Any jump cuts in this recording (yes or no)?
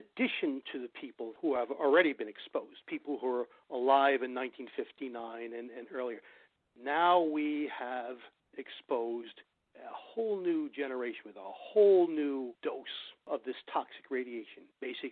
yes